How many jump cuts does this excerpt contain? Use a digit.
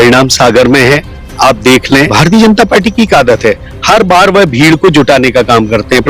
1